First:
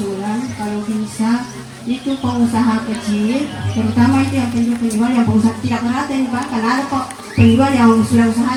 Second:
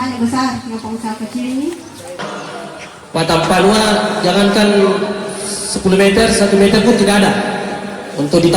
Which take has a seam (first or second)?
second